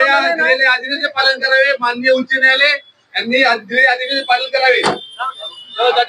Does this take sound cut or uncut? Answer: uncut